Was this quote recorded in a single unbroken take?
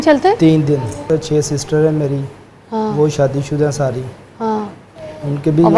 no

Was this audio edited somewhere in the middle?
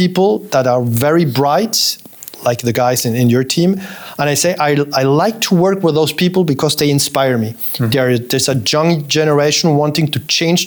no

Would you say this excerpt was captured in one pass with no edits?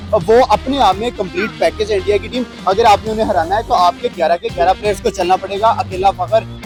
yes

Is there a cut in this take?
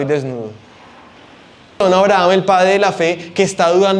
yes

